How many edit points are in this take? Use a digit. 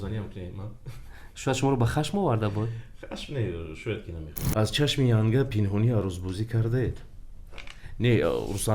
1